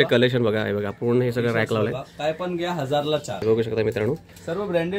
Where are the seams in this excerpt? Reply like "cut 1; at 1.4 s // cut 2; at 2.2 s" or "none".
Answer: cut 1; at 3.4 s